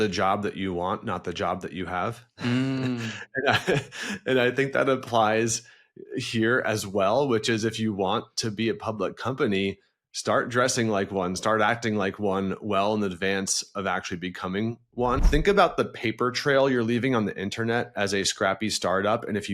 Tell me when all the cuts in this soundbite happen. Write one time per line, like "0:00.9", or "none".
0:15.2